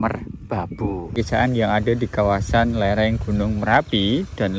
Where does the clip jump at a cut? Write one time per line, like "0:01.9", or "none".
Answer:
0:01.2